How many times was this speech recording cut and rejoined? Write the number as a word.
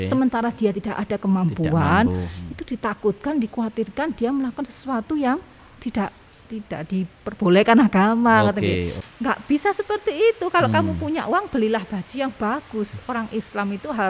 one